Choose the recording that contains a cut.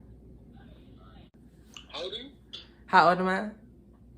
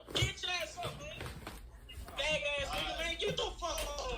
first; 1 cut; at 1.3 s

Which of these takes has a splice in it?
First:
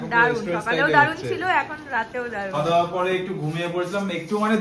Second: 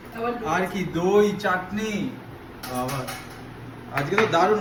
first; 1 cut; at 2.5 s

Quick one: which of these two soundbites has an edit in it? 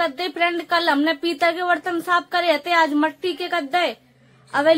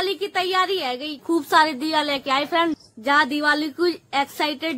second; 2 cuts; at 1.2 s, 2.9 s

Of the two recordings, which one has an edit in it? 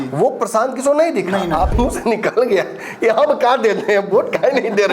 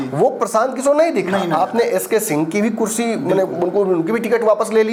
first; 1 cut; at 1.7 s

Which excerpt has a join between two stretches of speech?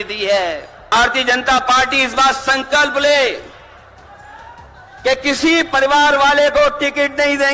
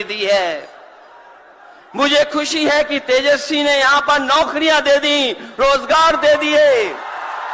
first; 1 cut; at 0.9 s

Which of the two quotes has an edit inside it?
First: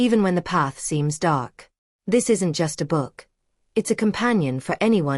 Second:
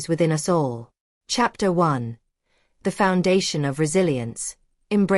second; 1 cut; at 1.1 s

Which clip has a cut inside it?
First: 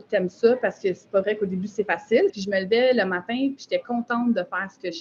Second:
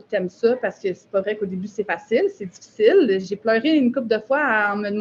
first; 1 cut; at 2.4 s

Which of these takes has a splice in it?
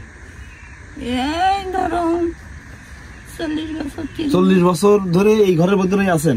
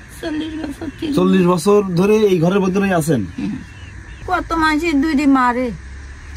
second; 1 cut; at 4.1 s

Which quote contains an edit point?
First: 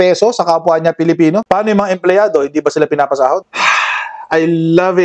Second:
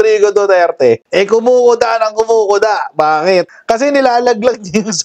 first; 1 cut; at 3.4 s

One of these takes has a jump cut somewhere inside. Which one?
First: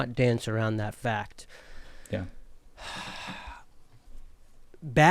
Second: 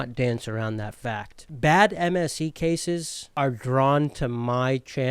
second; 2 cuts; at 1.4 s, 3.2 s

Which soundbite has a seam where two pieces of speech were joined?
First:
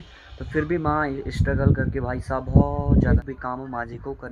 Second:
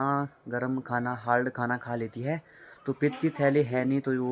first; 1 cut; at 3.2 s

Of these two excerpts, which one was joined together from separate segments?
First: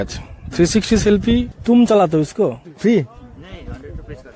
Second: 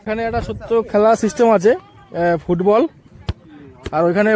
first; 2 cuts; at 1.5 s, 2.7 s

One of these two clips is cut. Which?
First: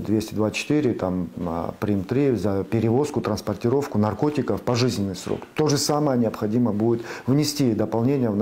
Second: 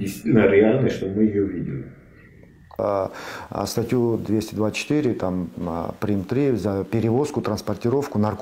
second; 1 cut; at 2.8 s

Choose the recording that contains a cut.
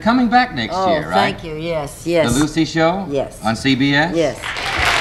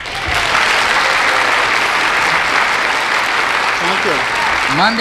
first; 1 cut; at 3.0 s

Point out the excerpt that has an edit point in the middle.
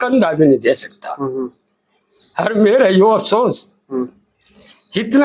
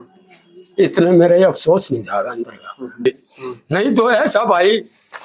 second; 1 cut; at 3.1 s

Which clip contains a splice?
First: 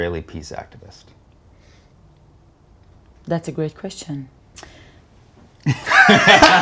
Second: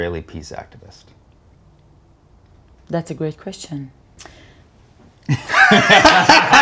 second; 1 cut; at 1.6 s

